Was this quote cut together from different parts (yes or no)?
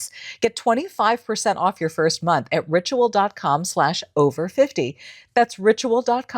no